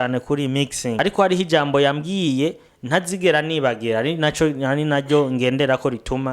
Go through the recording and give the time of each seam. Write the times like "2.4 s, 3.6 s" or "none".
1.0 s